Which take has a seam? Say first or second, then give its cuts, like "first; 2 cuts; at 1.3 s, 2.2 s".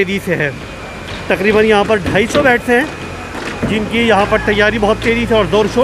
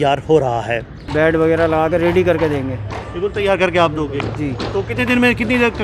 second; 1 cut; at 1.0 s